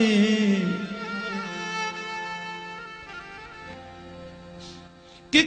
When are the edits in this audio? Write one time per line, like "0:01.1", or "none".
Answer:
0:03.7